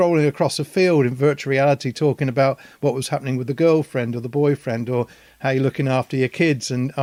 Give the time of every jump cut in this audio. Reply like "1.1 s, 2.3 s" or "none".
none